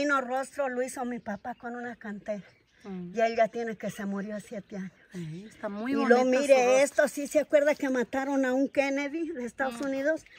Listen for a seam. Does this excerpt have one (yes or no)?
no